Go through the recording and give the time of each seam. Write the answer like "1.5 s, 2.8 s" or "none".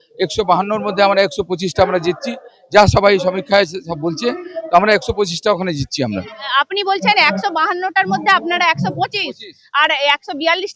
6.1 s